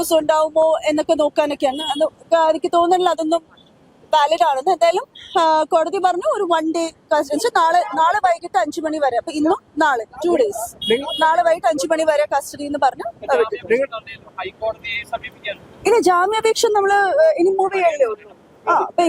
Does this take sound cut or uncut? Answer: uncut